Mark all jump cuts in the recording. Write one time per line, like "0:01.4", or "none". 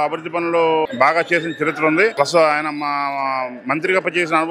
0:00.9
0:02.1